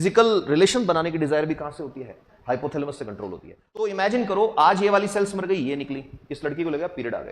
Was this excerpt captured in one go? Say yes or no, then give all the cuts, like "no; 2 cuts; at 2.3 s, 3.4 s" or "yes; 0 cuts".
no; 1 cut; at 3.9 s